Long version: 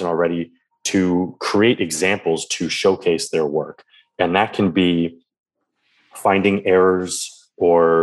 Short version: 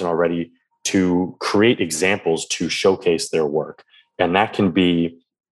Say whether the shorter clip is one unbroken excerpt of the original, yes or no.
yes